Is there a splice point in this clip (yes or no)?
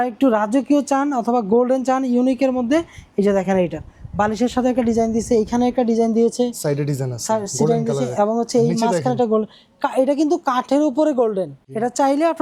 no